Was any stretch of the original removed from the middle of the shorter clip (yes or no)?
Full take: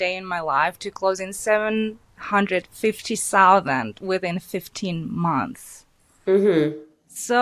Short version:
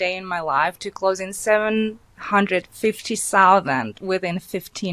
no